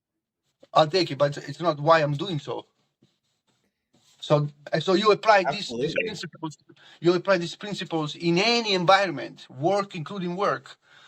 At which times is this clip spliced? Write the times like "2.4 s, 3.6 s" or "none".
1.4 s, 4.6 s